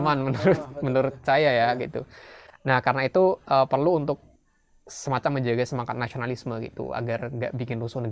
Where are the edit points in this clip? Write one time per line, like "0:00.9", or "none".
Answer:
none